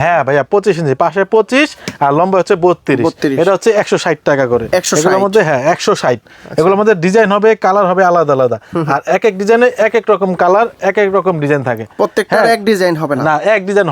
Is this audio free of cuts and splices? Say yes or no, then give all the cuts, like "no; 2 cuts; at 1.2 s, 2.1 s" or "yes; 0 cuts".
yes; 0 cuts